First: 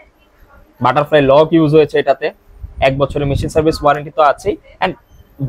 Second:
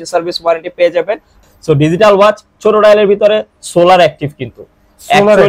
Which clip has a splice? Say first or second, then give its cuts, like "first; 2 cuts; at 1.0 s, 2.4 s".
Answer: second; 1 cut; at 1.5 s